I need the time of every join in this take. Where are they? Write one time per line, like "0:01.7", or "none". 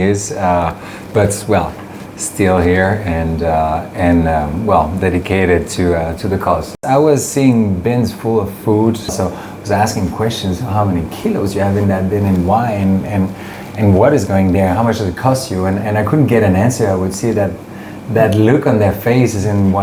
0:06.8
0:09.1